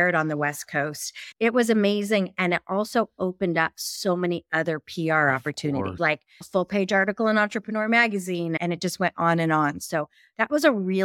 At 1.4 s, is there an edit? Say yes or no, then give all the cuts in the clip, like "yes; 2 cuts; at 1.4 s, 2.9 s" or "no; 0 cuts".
yes; 2 cuts; at 1.4 s, 6.3 s